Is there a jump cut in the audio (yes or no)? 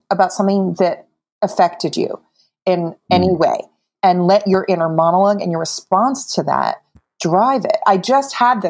yes